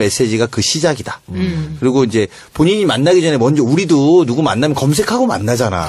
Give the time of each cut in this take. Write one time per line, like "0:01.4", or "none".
none

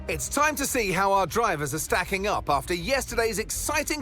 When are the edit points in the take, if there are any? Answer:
none

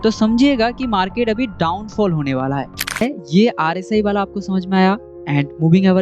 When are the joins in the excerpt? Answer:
0:03.0

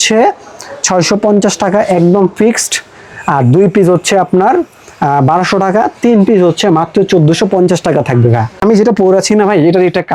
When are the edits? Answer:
0:08.8

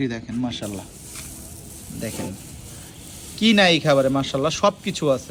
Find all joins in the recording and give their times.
none

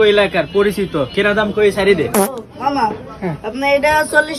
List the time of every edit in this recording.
0:02.3

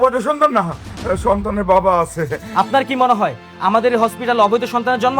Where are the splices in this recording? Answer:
0:02.4

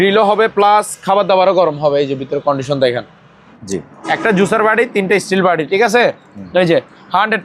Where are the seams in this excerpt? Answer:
0:03.5

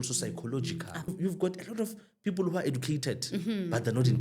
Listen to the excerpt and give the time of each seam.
0:01.1

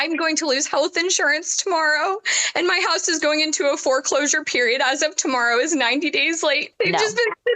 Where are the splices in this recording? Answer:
0:06.7

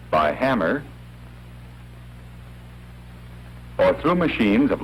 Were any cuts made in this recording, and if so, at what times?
none

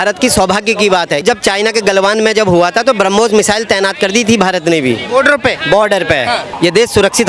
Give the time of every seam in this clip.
0:01.2
0:06.5

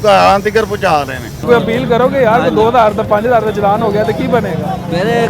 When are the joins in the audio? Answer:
0:01.4

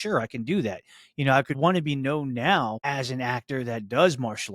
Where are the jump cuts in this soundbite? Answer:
0:01.6
0:02.8

